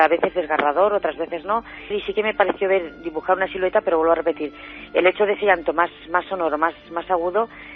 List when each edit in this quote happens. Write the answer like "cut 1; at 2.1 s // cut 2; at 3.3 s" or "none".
cut 1; at 1.8 s